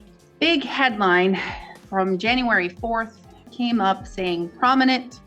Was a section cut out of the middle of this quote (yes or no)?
yes